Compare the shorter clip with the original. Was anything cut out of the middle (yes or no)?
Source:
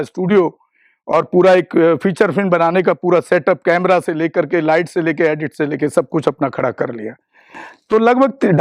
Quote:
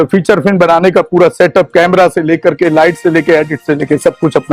no